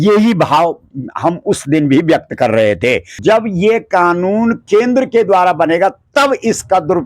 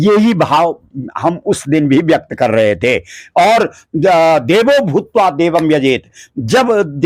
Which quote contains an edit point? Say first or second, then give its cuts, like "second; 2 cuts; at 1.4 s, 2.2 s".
first; 1 cut; at 3.2 s